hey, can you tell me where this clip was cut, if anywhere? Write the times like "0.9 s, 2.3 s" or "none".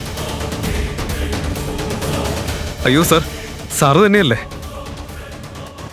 2.6 s